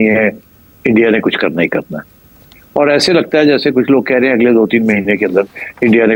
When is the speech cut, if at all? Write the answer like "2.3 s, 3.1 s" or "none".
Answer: none